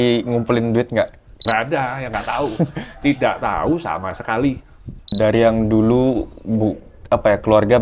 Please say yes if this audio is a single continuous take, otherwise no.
no